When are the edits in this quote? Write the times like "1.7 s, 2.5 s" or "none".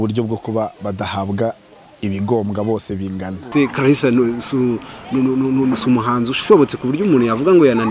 3.5 s